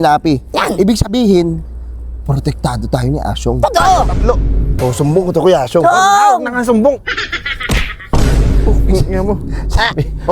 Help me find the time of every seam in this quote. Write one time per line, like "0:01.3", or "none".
0:04.8